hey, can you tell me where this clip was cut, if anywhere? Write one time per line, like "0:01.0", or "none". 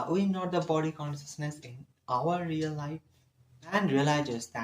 0:03.7